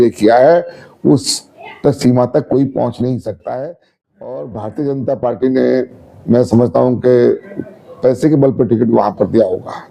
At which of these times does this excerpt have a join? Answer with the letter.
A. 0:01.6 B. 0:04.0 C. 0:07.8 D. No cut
B